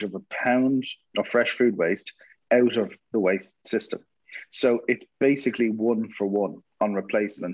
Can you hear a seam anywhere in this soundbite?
yes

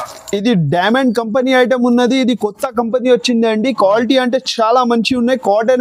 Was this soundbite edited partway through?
no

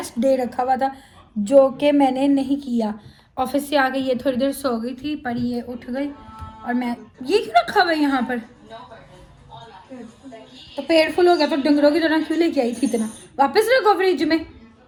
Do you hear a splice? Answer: no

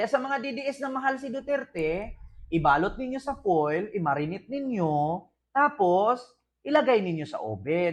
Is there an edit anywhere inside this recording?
no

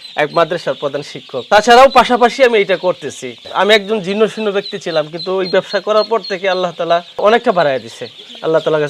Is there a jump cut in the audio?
no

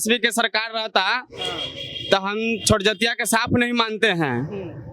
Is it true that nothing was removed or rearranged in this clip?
yes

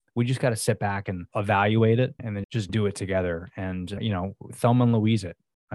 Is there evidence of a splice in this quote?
yes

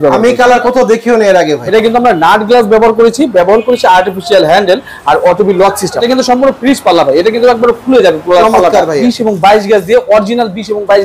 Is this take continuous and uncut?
no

